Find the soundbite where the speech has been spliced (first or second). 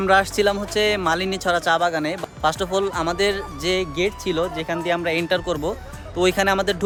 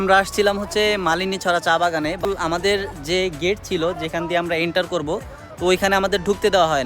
second